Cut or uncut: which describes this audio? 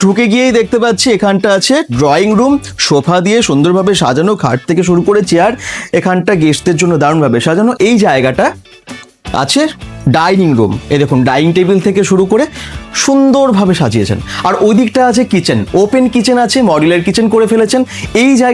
uncut